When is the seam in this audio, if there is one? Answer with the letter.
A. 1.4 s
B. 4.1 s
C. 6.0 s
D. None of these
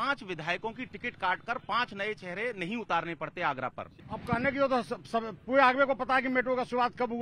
B